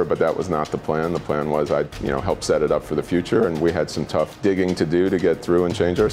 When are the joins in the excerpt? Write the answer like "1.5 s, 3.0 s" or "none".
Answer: 1.9 s, 4.3 s